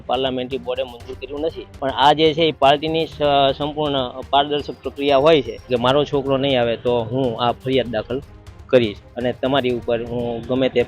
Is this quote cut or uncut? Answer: cut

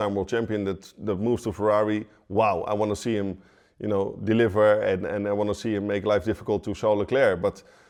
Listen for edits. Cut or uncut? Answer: uncut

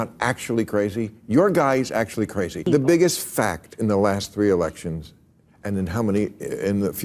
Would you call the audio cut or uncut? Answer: cut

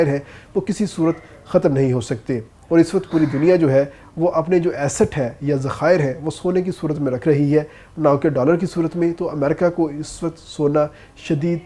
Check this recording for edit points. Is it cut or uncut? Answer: uncut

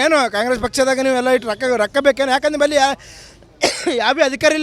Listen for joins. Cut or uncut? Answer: uncut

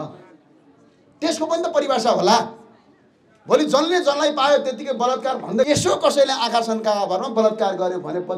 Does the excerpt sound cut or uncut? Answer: cut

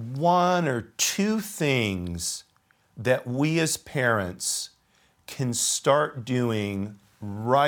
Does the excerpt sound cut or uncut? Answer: uncut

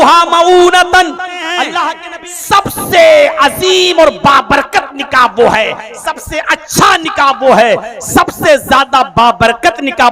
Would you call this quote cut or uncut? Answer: cut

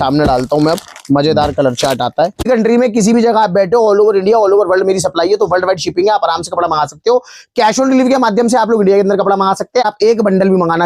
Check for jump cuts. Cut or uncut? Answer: cut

